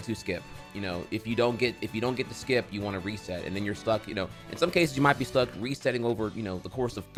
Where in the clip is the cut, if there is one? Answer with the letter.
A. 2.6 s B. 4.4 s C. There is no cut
C